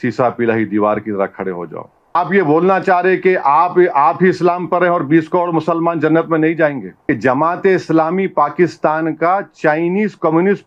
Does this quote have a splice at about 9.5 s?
no; 2 cuts; at 2.2 s, 6.9 s

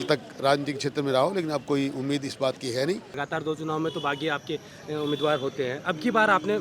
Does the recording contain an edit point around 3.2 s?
yes; 1 cut; at 3.2 s

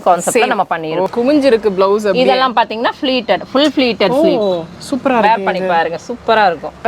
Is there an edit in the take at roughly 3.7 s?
no; 1 cut; at 1.1 s

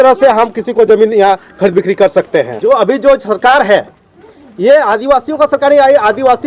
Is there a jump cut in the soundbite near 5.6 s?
no; 1 cut; at 2.6 s

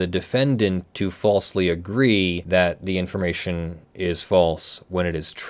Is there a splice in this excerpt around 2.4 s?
yes; 1 cut; at 2.4 s

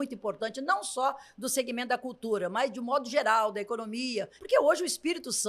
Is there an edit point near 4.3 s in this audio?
yes; 1 cut; at 4.3 s

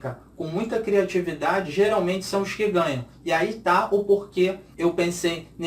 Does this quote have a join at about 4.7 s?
yes; 1 cut; at 4.7 s

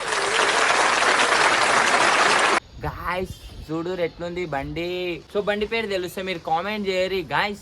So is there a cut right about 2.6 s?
yes; 2 cuts; at 2.6 s, 5.2 s

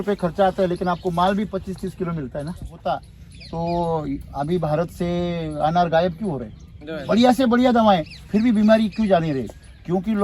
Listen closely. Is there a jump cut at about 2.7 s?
yes; 1 cut; at 2.7 s

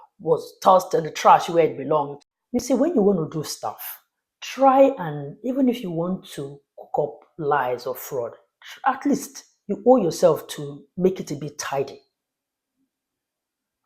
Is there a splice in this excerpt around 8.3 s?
no; 1 cut; at 2.1 s

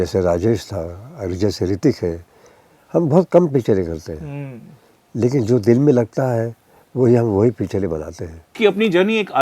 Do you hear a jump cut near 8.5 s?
yes; 1 cut; at 8.5 s

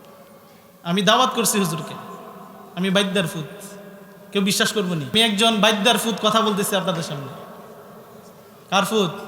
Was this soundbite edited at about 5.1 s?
yes; 1 cut; at 5.1 s

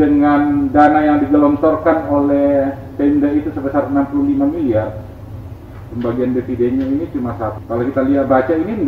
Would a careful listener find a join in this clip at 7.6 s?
yes; 1 cut; at 7.6 s

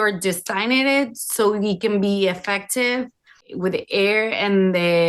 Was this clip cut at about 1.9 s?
no; 1 cut; at 3.4 s

